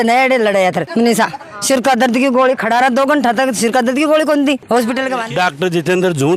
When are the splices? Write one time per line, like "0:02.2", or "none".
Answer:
0:01.5
0:05.3